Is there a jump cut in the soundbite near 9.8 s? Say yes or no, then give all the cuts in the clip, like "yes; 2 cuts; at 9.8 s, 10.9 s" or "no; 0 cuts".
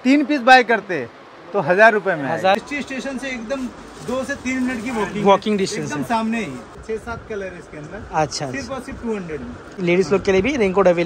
yes; 3 cuts; at 2.6 s, 6.8 s, 9.8 s